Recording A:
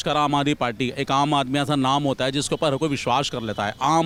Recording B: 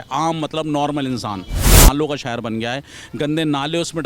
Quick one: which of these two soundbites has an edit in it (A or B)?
B